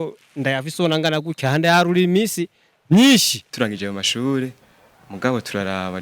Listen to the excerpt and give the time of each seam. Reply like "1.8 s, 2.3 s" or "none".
3.5 s